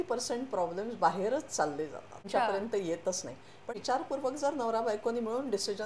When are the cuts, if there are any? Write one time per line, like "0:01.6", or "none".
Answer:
0:02.3
0:03.6